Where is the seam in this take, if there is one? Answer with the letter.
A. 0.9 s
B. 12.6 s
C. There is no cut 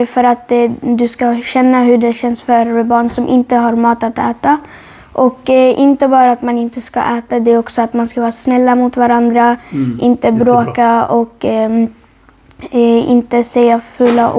C